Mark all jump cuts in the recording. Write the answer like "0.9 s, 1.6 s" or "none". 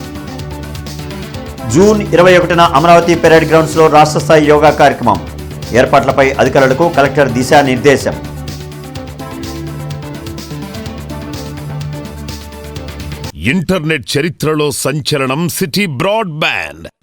13.2 s